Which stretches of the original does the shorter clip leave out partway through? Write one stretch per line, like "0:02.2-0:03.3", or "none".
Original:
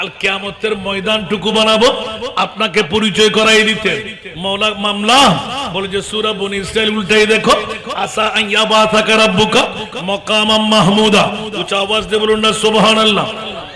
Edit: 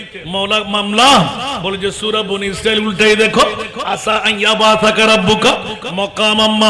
none